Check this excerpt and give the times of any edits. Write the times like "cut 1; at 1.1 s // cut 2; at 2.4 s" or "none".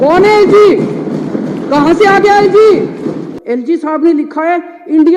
cut 1; at 3.3 s